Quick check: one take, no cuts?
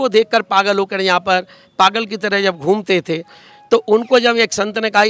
yes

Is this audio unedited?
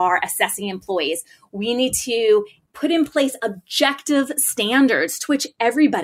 no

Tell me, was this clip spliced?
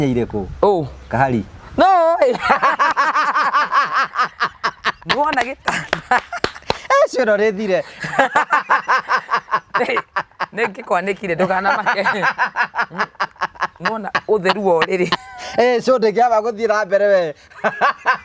no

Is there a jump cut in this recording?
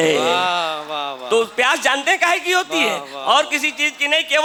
no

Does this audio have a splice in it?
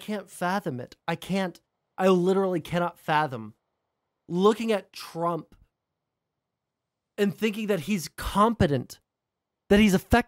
no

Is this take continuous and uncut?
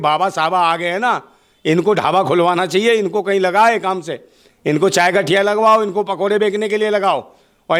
yes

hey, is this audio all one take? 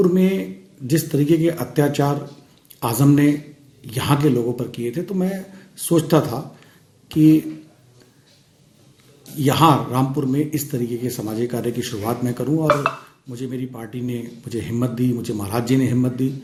yes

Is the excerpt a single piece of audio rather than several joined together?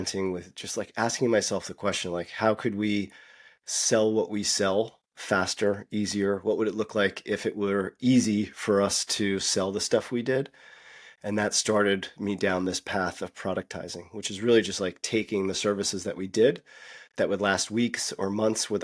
yes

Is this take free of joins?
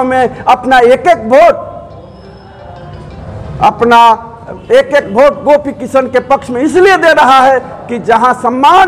yes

